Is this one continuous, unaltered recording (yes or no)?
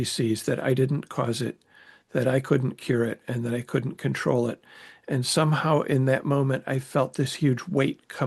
yes